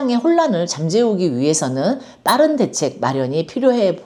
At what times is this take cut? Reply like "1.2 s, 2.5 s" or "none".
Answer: none